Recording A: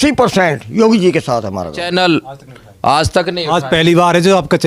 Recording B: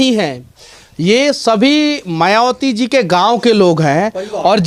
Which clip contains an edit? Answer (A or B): A